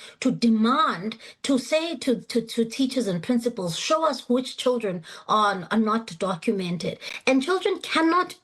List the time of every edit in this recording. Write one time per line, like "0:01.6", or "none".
0:07.0